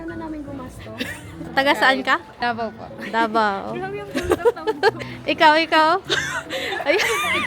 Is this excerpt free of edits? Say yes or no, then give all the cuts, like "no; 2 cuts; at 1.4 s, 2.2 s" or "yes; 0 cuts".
no; 3 cuts; at 1.5 s, 2.3 s, 5.1 s